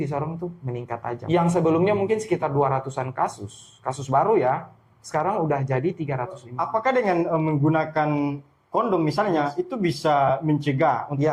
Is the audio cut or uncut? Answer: cut